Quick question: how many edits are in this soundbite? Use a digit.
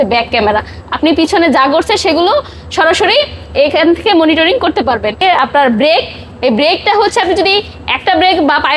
1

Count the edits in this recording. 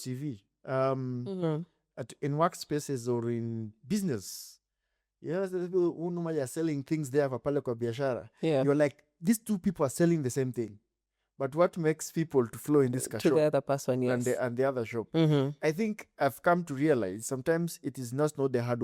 0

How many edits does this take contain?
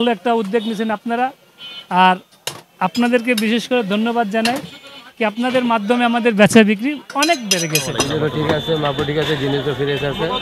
1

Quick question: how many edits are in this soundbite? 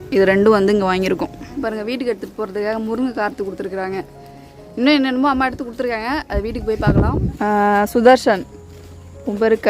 2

